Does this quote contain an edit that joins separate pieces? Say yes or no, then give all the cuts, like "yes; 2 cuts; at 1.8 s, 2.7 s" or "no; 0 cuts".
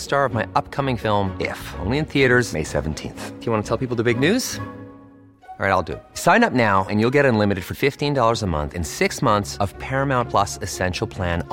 no; 0 cuts